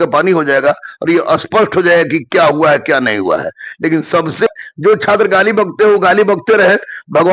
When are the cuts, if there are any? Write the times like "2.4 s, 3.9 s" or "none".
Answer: 4.5 s